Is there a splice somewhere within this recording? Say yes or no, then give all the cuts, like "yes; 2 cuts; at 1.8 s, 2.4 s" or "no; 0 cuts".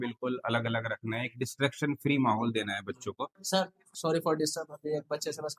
yes; 1 cut; at 3.6 s